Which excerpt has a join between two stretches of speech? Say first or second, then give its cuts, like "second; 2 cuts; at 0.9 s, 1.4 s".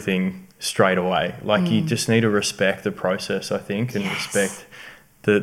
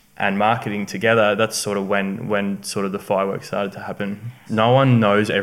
second; 1 cut; at 4.4 s